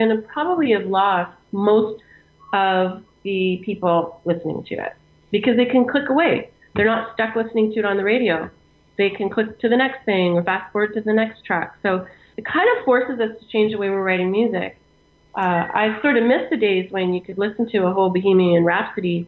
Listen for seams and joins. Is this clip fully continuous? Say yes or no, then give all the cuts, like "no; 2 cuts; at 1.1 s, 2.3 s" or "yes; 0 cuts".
no; 1 cut; at 12.3 s